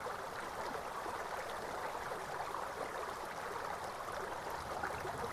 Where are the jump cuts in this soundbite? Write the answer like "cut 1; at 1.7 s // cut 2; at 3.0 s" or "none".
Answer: none